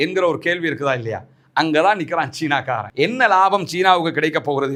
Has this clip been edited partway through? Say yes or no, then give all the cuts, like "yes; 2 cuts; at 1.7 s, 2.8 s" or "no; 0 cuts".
no; 0 cuts